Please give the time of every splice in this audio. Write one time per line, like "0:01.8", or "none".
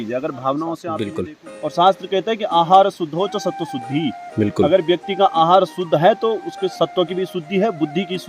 0:00.9